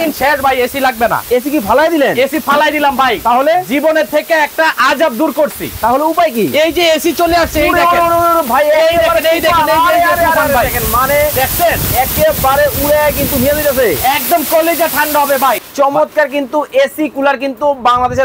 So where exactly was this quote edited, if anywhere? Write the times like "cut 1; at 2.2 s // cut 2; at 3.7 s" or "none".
cut 1; at 15.7 s